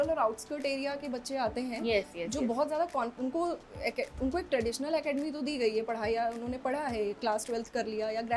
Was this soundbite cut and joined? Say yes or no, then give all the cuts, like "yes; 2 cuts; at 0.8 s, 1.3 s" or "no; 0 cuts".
no; 0 cuts